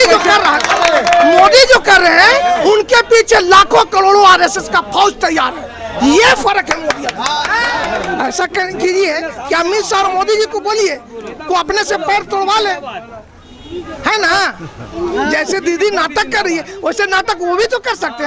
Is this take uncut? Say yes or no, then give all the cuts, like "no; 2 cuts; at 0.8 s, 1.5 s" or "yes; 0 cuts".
no; 1 cut; at 7.8 s